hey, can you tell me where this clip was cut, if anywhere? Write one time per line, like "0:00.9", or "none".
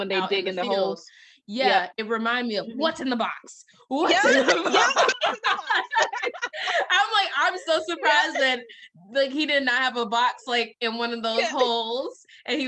0:05.8